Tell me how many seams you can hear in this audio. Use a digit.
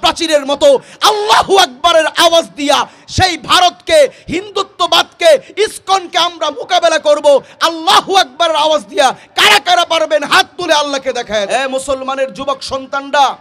1